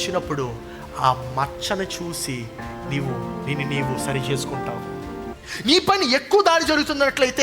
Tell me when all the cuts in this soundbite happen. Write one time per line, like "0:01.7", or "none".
0:05.4